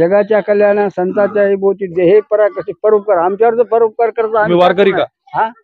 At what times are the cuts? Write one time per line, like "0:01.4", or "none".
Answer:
none